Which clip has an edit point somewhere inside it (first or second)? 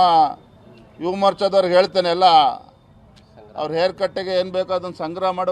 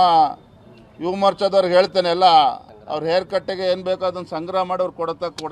second